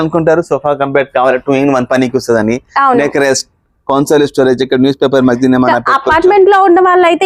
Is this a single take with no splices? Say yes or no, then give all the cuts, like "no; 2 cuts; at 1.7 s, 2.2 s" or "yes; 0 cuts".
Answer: yes; 0 cuts